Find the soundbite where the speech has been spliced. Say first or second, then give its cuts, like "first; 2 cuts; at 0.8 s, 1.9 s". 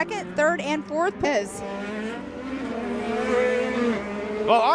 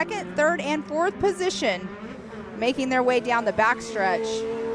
first; 1 cut; at 1.2 s